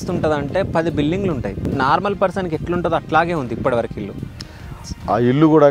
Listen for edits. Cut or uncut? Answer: cut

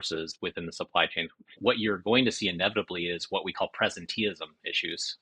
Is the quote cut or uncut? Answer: cut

